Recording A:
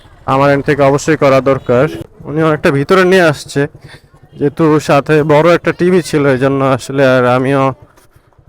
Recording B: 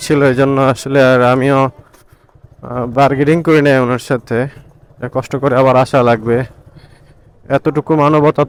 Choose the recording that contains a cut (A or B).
A